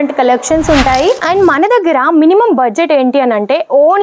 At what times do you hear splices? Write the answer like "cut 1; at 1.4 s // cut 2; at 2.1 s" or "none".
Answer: cut 1; at 1.2 s